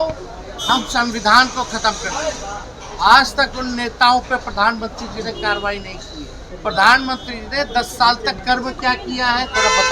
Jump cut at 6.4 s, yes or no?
yes